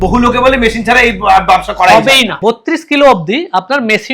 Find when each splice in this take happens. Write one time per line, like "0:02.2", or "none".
0:02.3